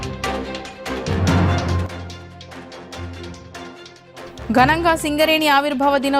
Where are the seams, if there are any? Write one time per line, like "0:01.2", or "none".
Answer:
none